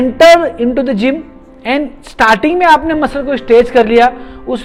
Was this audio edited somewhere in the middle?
no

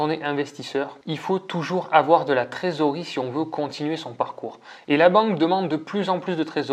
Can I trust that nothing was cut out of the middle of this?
no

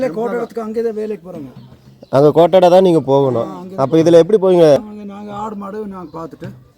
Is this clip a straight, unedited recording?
no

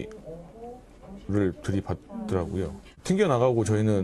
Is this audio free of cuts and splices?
no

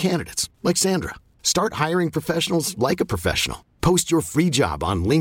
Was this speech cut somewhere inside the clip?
no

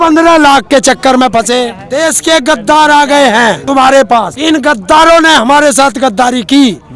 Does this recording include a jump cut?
yes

